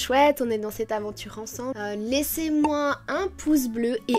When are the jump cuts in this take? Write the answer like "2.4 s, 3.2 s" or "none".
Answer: 1.7 s